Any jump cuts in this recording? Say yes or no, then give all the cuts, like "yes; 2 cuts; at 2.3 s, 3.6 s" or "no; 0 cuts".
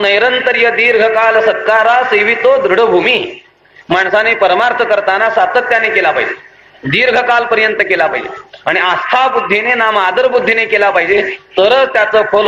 no; 0 cuts